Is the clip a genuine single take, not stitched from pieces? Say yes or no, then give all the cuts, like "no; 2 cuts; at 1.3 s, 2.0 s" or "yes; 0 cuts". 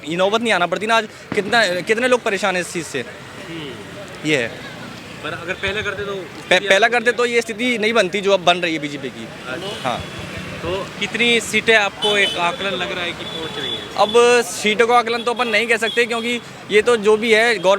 yes; 0 cuts